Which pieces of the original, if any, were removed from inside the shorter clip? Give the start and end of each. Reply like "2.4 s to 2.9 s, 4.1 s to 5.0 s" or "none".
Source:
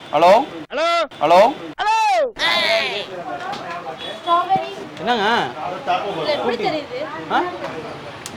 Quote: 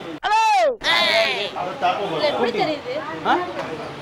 3.1 s to 5.6 s